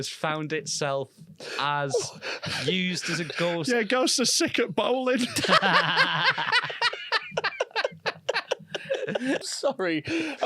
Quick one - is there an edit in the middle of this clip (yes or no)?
yes